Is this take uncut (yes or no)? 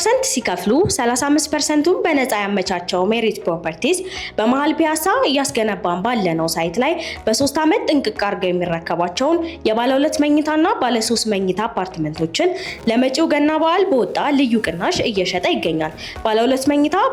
yes